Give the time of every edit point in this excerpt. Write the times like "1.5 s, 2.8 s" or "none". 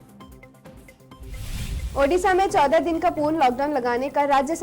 1.2 s